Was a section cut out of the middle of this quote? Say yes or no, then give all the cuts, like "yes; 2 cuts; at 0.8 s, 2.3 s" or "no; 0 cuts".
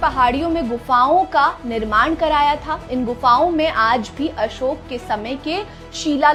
no; 0 cuts